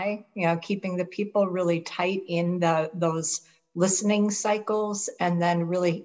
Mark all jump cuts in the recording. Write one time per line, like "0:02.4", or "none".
none

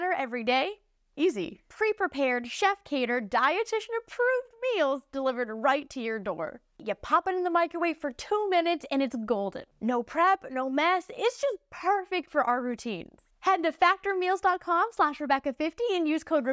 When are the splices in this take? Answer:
0:06.8

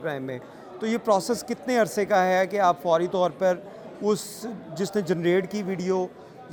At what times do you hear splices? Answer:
none

